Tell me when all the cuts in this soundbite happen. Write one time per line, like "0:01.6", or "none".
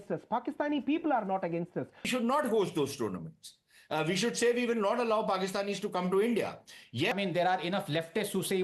0:02.1
0:07.1